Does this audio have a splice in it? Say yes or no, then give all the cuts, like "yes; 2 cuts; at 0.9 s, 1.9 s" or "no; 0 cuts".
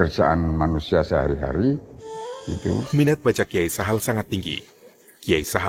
yes; 1 cut; at 2.9 s